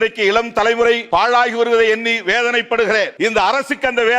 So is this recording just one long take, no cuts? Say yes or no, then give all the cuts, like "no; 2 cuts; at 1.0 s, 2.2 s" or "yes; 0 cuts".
no; 2 cuts; at 1.0 s, 3.1 s